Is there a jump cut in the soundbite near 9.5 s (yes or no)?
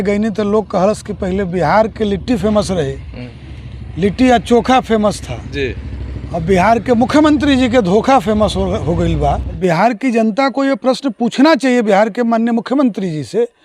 yes